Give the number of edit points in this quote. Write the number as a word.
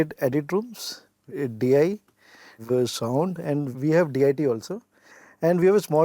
three